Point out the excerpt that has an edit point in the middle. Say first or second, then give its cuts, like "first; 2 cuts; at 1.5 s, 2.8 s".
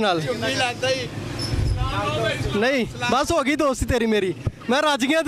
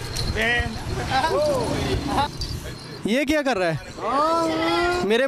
second; 1 cut; at 2.3 s